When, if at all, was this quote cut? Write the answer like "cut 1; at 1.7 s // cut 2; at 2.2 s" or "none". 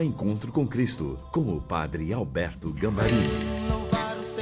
cut 1; at 3.2 s